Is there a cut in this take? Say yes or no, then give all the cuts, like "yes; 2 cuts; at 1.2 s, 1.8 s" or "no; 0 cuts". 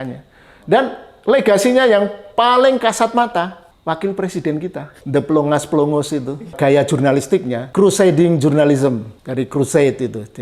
yes; 5 cuts; at 3.7 s, 4.9 s, 6.6 s, 7.6 s, 9.2 s